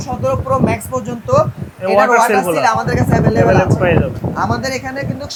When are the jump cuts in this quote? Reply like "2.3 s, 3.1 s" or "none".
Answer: none